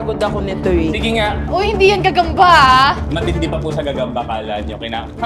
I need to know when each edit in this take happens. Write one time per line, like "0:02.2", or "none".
0:01.5